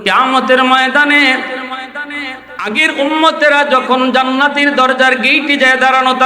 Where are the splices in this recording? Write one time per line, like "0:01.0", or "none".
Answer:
0:02.6